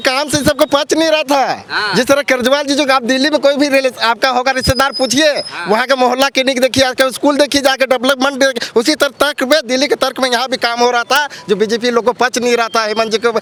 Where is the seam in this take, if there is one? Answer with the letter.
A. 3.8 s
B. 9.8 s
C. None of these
C